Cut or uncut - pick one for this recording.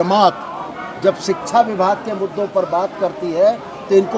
uncut